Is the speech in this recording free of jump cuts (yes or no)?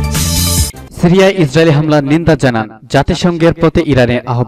yes